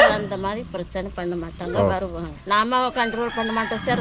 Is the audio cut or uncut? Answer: cut